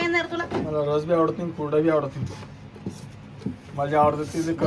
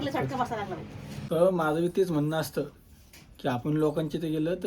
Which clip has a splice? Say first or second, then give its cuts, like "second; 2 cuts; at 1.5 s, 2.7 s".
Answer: second; 1 cut; at 1.2 s